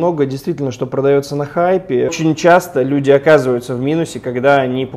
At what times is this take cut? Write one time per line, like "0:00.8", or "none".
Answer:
0:02.1